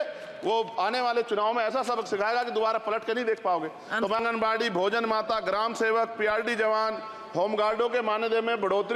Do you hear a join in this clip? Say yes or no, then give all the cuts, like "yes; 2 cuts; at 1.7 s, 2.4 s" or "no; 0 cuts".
yes; 1 cut; at 4.2 s